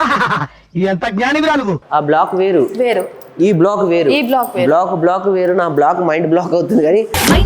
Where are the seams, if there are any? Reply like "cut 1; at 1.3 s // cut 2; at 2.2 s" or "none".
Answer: cut 1; at 1.8 s